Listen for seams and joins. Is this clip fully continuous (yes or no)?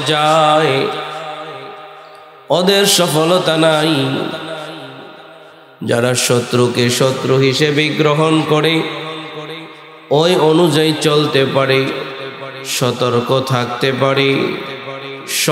yes